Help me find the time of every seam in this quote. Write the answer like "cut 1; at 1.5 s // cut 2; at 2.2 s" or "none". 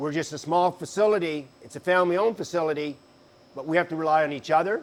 none